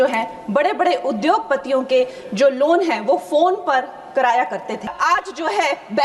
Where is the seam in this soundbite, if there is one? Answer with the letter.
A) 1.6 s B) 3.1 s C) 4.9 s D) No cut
C